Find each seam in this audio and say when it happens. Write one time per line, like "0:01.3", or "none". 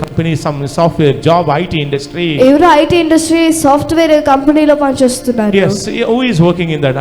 none